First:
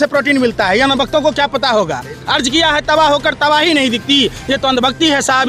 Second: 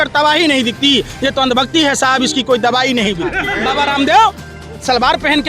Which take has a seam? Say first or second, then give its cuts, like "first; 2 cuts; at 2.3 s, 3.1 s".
second; 1 cut; at 3.5 s